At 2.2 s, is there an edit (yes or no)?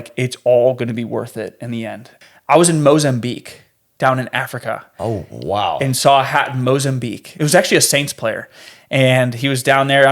yes